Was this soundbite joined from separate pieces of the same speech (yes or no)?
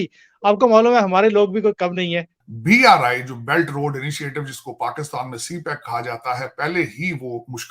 yes